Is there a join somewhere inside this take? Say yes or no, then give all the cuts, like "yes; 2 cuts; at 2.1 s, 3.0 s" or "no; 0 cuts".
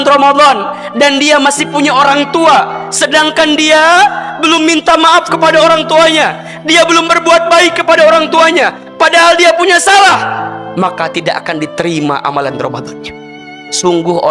yes; 1 cut; at 13.4 s